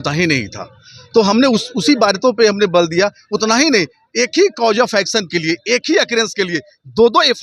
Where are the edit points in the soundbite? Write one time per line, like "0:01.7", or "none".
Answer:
none